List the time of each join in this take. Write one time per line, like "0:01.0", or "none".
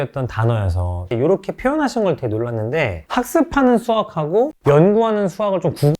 0:01.1